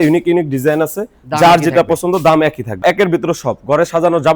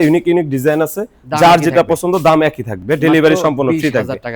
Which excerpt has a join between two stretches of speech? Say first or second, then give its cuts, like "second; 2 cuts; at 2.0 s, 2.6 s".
first; 1 cut; at 2.8 s